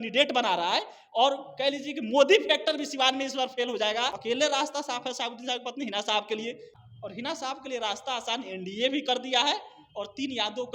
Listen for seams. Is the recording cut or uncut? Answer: cut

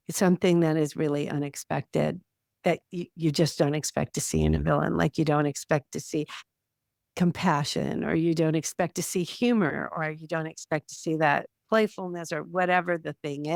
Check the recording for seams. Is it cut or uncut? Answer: uncut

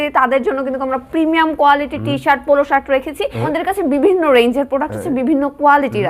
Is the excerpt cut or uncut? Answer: cut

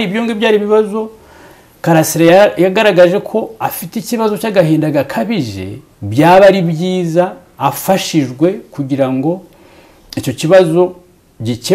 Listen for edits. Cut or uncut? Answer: uncut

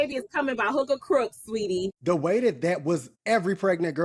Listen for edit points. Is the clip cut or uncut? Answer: cut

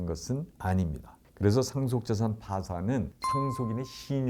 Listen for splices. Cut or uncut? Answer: uncut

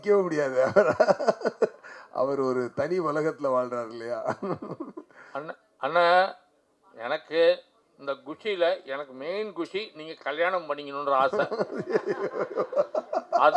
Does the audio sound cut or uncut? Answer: uncut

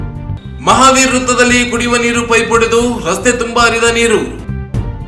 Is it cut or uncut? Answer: uncut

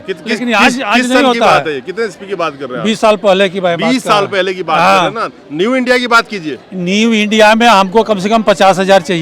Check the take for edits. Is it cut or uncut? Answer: uncut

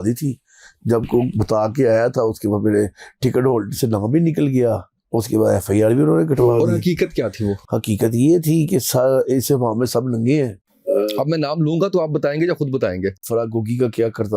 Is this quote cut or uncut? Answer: cut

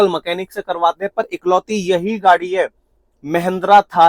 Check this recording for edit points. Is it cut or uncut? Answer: uncut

